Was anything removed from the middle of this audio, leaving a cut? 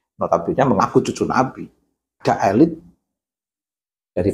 yes; 1 cut; at 2.2 s

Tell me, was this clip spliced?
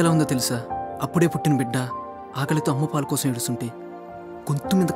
no; 0 cuts

